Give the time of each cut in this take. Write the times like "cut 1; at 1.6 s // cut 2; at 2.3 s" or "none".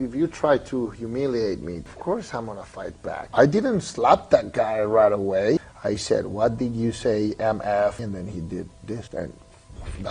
cut 1; at 1.9 s // cut 2; at 3.3 s // cut 3; at 5.6 s // cut 4; at 8.0 s // cut 5; at 9.1 s